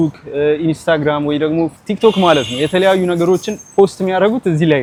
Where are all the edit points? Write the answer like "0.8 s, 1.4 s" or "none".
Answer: none